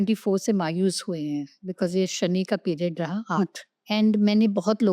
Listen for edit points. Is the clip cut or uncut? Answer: cut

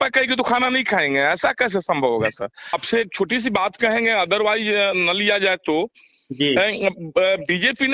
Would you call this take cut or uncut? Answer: uncut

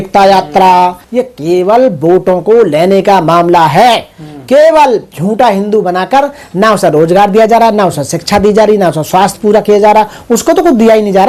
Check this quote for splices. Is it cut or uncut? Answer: uncut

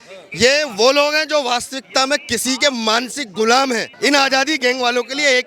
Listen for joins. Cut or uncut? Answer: cut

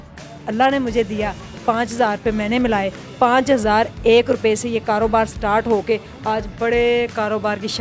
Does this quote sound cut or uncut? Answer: uncut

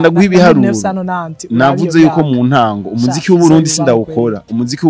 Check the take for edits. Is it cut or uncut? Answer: uncut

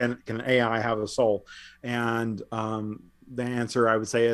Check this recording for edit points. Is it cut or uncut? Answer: uncut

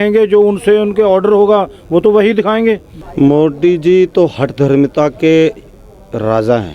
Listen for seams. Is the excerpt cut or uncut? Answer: cut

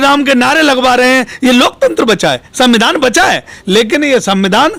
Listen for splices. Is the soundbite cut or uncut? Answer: uncut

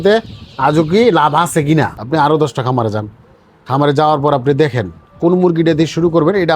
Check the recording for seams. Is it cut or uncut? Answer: cut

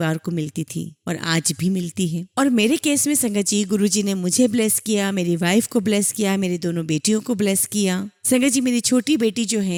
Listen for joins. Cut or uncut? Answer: uncut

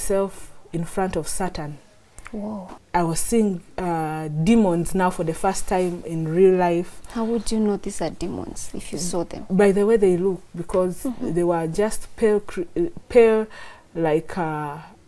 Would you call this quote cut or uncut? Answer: cut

